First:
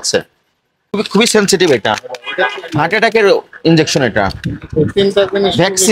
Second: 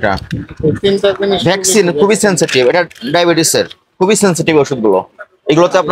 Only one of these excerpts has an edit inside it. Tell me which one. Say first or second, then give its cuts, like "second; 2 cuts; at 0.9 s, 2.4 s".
first; 1 cut; at 1.0 s